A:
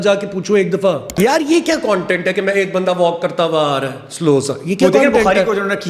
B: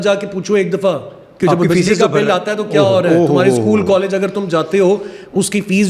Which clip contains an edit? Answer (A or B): A